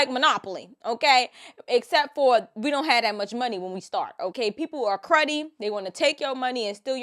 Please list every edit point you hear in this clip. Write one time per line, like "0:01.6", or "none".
0:04.3